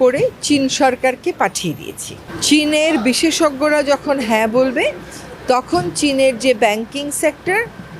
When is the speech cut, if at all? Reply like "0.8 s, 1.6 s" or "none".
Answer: 2.3 s